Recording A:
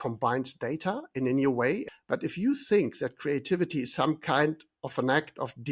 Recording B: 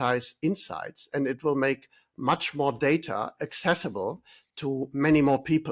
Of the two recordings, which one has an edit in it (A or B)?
A